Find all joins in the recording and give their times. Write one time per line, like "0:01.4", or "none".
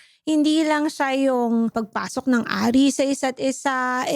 0:01.8